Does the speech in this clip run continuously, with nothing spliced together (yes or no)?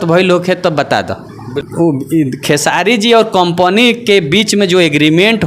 no